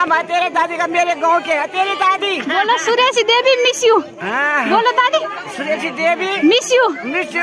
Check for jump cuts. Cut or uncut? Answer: uncut